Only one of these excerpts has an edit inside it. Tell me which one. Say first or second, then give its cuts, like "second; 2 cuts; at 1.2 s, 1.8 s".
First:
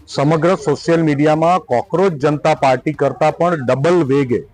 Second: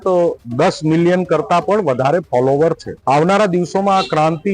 second; 1 cut; at 2.9 s